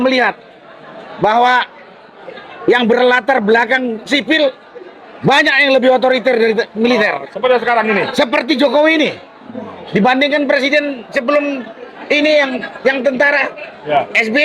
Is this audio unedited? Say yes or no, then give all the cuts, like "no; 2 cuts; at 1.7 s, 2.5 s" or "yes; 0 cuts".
yes; 0 cuts